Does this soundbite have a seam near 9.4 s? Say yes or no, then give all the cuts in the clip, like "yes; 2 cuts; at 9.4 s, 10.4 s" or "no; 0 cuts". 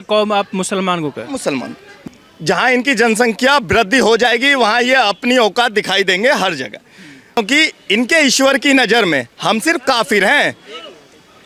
no; 2 cuts; at 1.9 s, 7.4 s